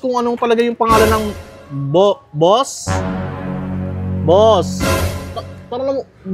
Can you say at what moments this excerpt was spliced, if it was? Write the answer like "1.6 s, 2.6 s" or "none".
none